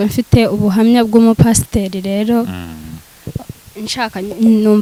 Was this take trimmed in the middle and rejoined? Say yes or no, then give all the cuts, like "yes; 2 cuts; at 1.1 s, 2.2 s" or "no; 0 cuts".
no; 0 cuts